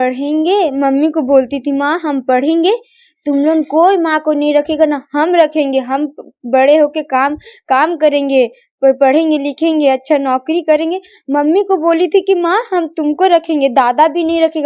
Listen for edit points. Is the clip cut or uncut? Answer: uncut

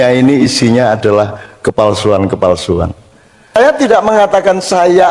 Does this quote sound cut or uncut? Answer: cut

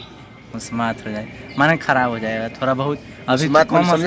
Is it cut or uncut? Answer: uncut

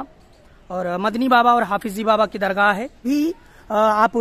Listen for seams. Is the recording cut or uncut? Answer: cut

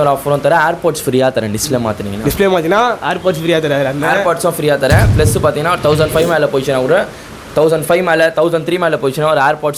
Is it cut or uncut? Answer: uncut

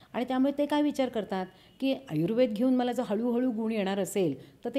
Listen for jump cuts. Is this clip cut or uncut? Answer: uncut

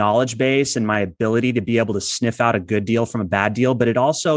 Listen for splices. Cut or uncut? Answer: uncut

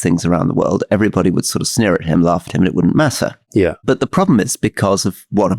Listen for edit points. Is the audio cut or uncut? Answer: uncut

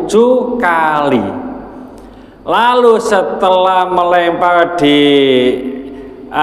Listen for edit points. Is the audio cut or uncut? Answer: uncut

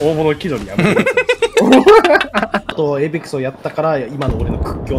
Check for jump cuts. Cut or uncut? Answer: cut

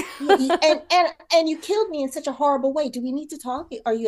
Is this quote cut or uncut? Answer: uncut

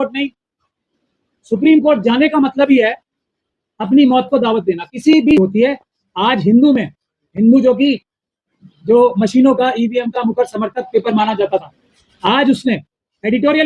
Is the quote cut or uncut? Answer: cut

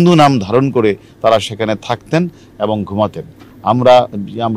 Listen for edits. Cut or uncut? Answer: uncut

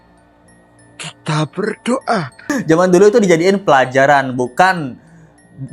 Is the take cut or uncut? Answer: cut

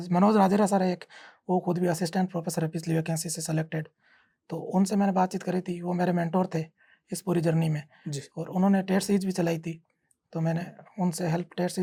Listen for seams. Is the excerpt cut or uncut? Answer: uncut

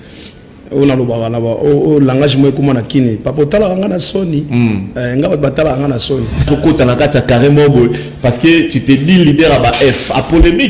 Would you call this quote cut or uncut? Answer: cut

